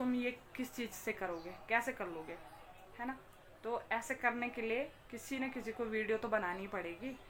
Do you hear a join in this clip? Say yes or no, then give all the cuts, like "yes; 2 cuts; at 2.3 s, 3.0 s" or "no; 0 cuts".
no; 0 cuts